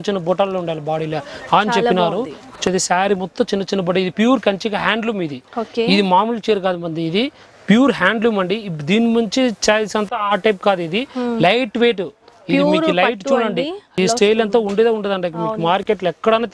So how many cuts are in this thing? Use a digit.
2